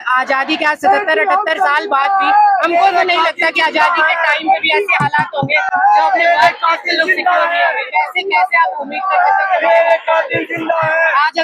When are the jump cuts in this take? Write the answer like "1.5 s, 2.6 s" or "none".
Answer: none